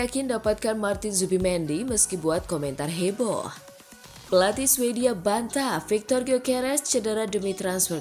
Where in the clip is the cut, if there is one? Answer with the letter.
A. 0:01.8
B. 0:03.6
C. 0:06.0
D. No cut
B